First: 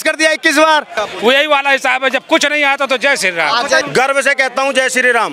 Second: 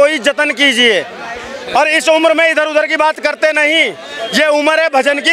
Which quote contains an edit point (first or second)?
first